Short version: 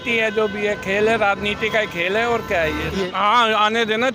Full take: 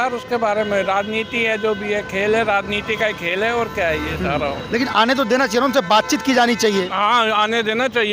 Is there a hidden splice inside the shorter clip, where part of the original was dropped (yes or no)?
yes